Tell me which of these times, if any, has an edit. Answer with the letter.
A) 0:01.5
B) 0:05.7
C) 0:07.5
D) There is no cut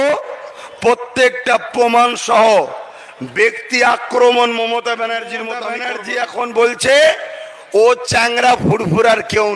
B